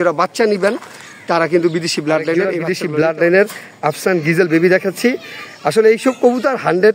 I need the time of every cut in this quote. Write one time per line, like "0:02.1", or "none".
0:02.5